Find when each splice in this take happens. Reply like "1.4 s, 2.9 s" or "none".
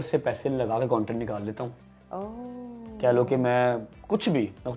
none